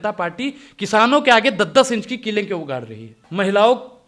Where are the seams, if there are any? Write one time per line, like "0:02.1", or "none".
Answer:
0:03.2